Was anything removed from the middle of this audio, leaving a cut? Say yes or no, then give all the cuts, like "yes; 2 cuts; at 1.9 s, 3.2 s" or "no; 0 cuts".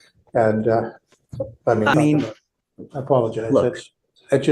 yes; 1 cut; at 1.9 s